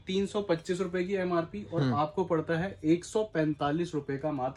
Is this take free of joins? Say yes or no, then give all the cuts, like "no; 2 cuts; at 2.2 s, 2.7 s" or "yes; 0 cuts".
yes; 0 cuts